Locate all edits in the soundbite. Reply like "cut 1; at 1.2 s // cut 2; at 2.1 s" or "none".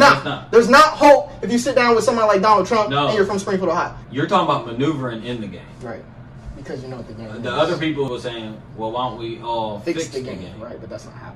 cut 1; at 4.0 s // cut 2; at 8.1 s